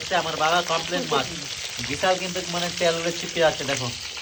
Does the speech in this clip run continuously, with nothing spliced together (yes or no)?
yes